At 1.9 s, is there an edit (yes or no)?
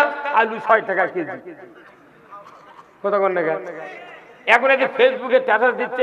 no